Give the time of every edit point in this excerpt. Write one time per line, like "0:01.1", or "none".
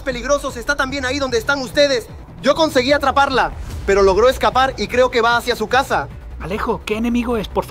0:06.4